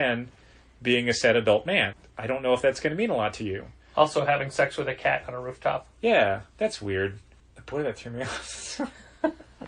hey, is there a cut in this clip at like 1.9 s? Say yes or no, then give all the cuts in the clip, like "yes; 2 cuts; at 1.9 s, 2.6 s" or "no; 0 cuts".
yes; 1 cut; at 1.9 s